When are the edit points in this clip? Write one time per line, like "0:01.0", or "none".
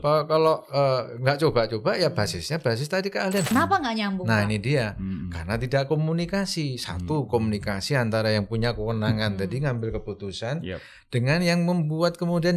0:03.5